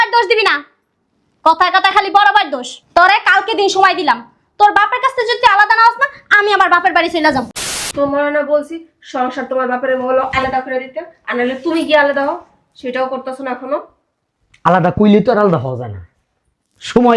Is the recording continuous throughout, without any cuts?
no; 1 cut; at 7.6 s

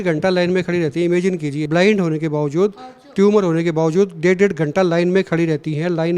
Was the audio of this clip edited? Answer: yes; 1 cut; at 1.6 s

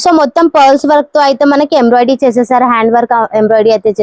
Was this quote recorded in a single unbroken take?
yes; 0 cuts

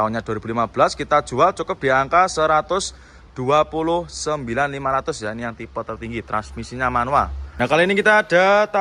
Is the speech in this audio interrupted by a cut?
yes; 1 cut; at 7.6 s

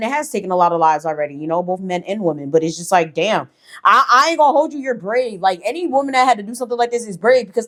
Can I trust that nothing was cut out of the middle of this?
yes; 0 cuts

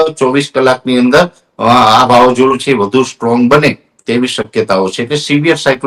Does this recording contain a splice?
no; 0 cuts

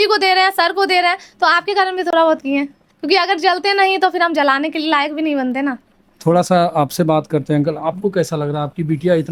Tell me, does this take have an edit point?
no; 0 cuts

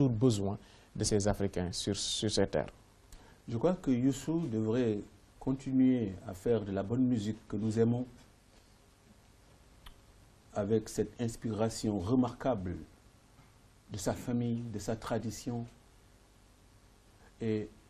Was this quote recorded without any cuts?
no; 1 cut; at 15.0 s

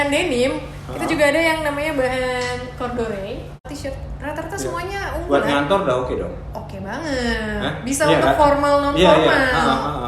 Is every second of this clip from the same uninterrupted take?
no; 1 cut; at 3.6 s

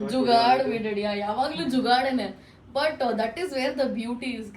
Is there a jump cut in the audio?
no; 0 cuts

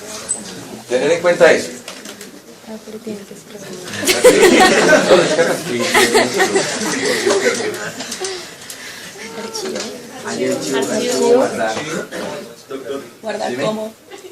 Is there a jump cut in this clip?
yes; 1 cut; at 8.1 s

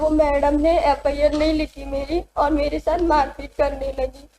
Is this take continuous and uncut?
yes; 0 cuts

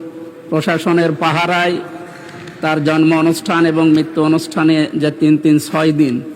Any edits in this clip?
no; 0 cuts

